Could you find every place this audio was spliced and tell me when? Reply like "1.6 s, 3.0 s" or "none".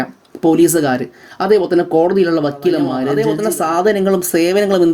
3.1 s